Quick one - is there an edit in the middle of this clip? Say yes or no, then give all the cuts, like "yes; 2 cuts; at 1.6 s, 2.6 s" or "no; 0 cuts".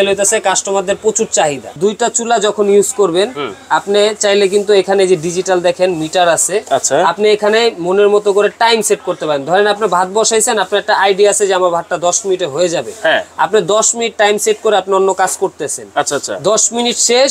yes; 1 cut; at 1.7 s